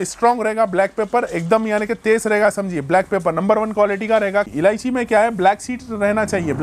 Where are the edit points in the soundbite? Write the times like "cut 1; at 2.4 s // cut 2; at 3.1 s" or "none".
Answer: cut 1; at 4.5 s